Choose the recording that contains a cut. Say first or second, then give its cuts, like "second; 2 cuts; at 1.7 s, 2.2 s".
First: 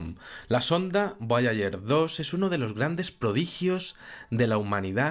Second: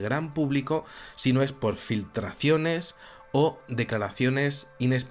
second; 1 cut; at 1.8 s